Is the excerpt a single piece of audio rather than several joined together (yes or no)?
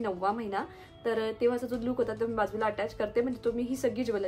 yes